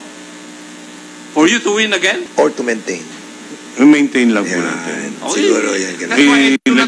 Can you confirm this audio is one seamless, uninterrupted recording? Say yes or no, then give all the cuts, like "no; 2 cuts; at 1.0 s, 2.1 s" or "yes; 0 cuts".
no; 1 cut; at 2.3 s